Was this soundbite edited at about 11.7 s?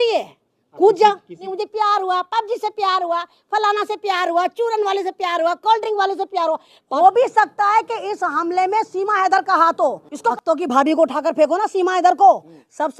no; 3 cuts; at 1.5 s, 6.8 s, 10.3 s

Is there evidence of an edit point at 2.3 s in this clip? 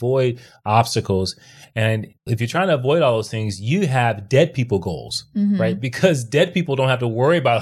yes; 1 cut; at 2.3 s

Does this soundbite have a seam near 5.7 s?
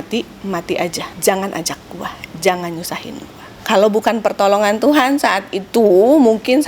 no; 2 cuts; at 1.1 s, 3.6 s

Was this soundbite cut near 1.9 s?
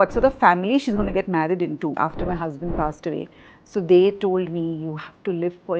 yes; 1 cut; at 1.9 s

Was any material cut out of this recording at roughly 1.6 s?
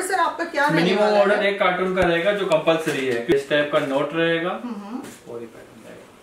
no; 1 cut; at 3.3 s

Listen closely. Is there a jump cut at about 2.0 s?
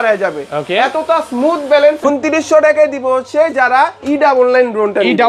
yes; 1 cut; at 2.0 s

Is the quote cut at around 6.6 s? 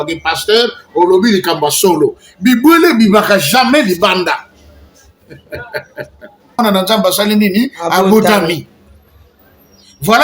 yes; 1 cut; at 6.6 s

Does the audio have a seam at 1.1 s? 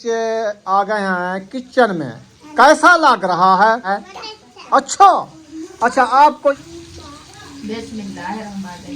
no; 2 cuts; at 3.9 s, 6.6 s

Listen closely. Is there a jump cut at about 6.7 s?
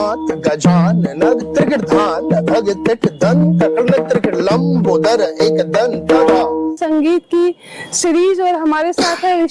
yes; 1 cut; at 6.7 s

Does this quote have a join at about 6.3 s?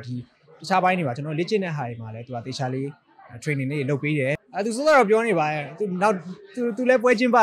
no; 1 cut; at 4.4 s

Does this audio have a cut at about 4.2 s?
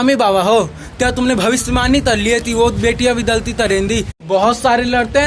yes; 1 cut; at 4.2 s

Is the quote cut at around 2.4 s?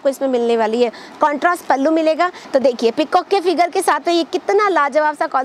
yes; 1 cut; at 2.4 s

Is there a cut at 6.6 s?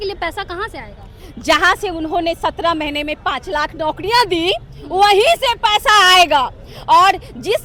no; 0 cuts

